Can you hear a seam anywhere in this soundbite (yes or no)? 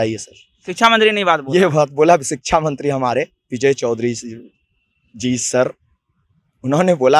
no